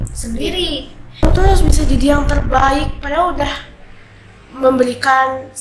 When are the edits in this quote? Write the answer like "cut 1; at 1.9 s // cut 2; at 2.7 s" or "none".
cut 1; at 1.2 s